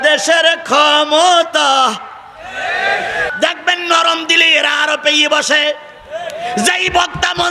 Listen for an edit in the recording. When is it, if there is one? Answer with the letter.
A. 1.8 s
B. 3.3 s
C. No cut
B